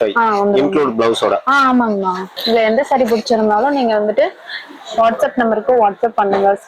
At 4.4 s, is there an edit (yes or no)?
no